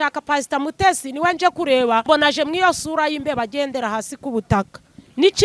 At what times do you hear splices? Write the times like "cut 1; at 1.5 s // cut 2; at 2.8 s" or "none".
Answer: cut 1; at 2.1 s